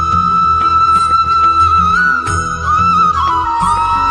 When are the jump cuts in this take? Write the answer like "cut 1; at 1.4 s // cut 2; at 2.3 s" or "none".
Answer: none